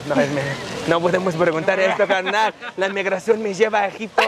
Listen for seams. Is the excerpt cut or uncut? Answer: uncut